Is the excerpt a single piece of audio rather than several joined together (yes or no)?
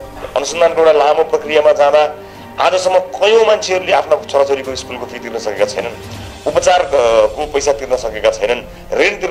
yes